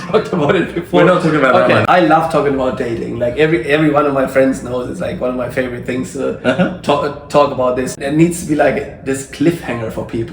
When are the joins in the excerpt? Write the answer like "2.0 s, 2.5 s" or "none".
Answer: 1.8 s, 7.9 s